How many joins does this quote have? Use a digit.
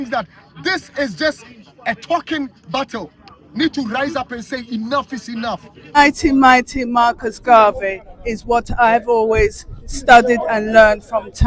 1